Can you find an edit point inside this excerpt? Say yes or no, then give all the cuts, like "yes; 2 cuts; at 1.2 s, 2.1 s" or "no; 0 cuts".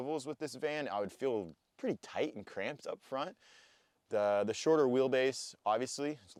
no; 0 cuts